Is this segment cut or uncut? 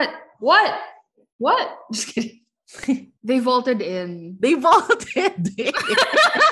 cut